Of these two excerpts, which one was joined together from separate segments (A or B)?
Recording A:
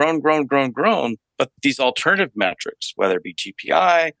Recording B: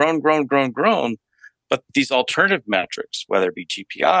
A